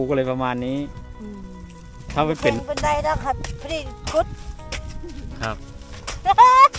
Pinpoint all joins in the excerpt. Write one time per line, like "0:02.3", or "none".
0:02.6